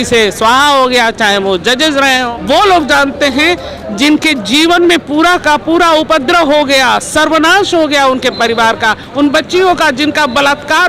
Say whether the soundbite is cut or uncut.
cut